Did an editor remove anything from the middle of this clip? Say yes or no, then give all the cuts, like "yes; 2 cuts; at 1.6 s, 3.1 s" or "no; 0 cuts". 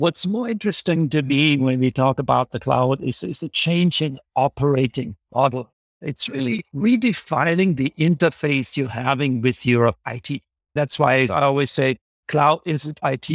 no; 0 cuts